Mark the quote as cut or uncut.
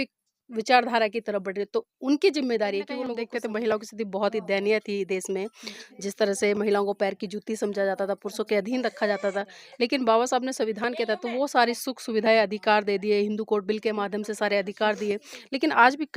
cut